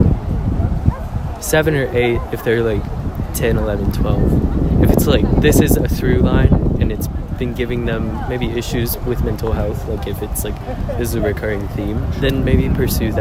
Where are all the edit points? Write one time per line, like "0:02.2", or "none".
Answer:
none